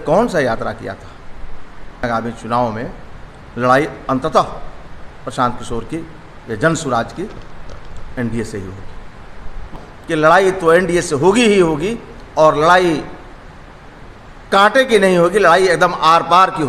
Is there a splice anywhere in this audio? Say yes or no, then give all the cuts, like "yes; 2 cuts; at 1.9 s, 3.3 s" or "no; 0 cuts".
yes; 2 cuts; at 2.0 s, 9.8 s